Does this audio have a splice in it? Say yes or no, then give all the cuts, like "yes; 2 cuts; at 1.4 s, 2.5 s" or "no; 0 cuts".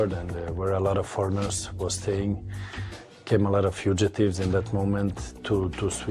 yes; 1 cut; at 3.6 s